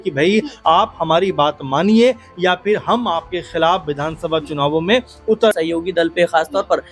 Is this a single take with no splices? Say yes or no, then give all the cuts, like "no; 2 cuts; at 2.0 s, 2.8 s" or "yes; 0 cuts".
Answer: no; 1 cut; at 5.5 s